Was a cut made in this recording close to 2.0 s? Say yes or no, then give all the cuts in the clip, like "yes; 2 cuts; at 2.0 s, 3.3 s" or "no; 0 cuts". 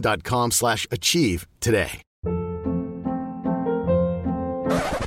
yes; 1 cut; at 2.0 s